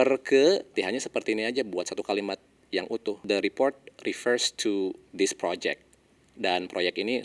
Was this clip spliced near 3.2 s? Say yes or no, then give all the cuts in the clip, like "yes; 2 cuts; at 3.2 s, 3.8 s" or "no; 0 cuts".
yes; 3 cuts; at 0.7 s, 3.2 s, 5.0 s